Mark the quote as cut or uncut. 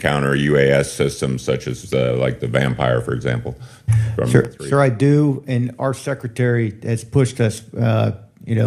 uncut